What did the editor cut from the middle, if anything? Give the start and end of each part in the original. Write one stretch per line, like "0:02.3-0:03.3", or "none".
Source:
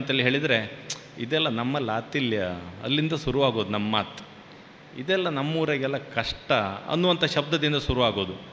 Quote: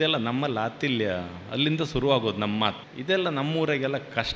0:04.2-0:04.9